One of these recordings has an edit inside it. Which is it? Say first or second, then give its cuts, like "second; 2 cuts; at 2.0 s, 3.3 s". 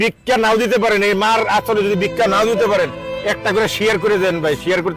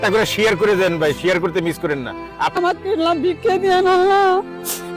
second; 1 cut; at 2.6 s